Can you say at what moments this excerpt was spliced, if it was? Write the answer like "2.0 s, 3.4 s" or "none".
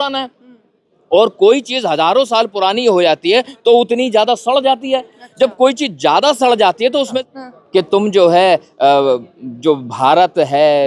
7.2 s